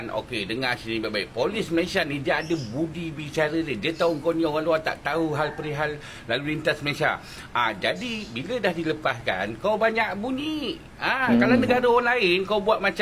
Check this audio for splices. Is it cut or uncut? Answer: uncut